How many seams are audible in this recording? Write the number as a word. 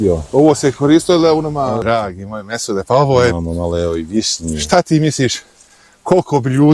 one